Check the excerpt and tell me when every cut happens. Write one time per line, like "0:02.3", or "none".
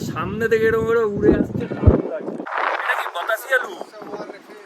0:02.5